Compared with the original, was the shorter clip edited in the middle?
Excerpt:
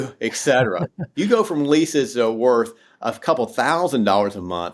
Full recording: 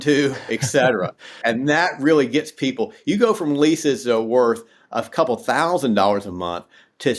yes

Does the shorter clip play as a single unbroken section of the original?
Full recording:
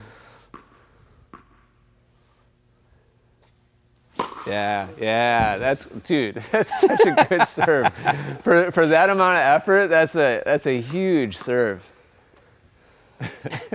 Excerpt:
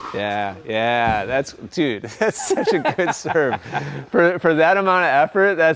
yes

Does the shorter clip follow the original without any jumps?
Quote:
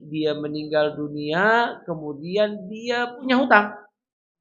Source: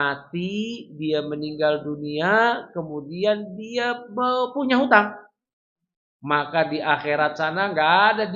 no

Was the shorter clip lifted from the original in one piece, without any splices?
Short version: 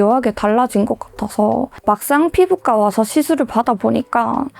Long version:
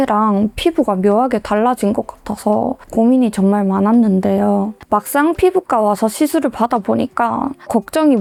no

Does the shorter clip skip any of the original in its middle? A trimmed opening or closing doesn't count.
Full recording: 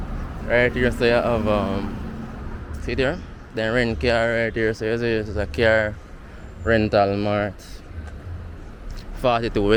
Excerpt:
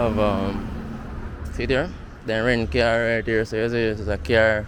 no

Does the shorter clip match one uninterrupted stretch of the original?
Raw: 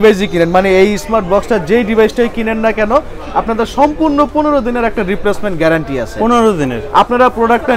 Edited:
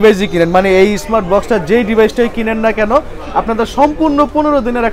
yes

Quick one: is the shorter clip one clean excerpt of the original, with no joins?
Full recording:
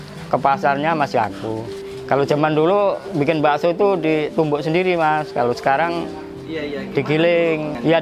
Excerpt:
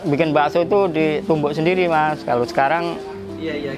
yes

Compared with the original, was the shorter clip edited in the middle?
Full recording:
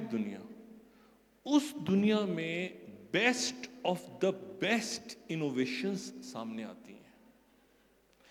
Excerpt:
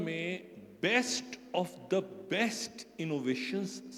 no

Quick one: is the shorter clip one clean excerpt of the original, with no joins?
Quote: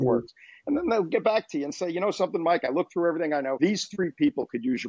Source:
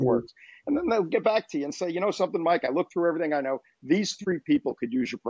no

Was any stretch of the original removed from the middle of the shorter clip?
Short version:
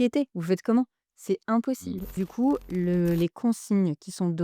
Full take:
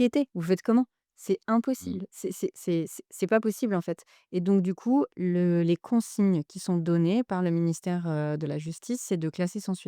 yes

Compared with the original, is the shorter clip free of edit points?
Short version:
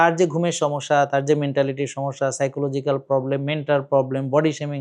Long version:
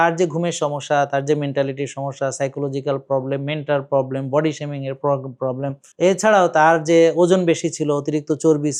yes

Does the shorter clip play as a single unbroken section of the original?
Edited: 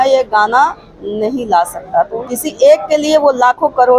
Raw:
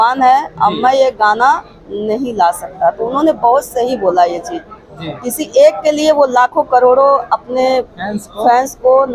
no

